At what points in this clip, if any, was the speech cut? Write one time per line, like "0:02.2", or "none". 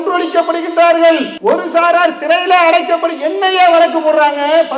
0:01.3